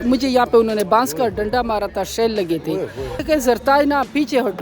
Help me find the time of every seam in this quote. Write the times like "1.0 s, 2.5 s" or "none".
3.2 s